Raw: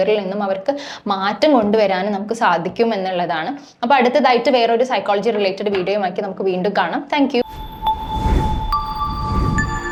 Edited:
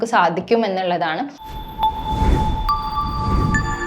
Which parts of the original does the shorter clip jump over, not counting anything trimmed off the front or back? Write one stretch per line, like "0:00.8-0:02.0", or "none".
0:03.8-0:07.5